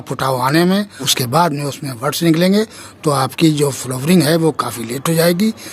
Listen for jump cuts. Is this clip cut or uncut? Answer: cut